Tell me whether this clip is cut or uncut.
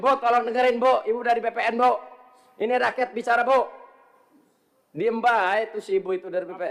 uncut